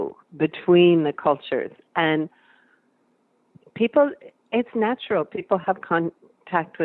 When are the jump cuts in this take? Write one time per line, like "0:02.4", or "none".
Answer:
none